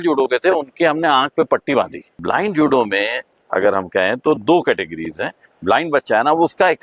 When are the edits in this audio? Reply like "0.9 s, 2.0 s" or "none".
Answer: 2.2 s, 5.5 s